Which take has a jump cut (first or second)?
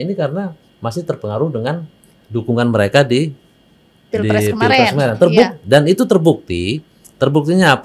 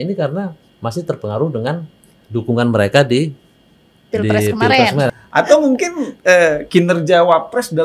second